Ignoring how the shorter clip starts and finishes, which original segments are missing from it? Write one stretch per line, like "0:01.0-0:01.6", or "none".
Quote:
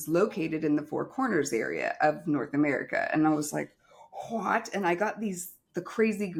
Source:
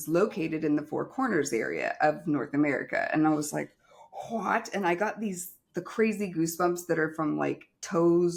none